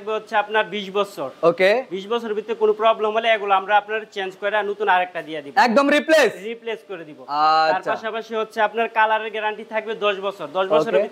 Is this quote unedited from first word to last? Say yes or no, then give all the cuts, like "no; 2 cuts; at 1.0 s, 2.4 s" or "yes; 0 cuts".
yes; 0 cuts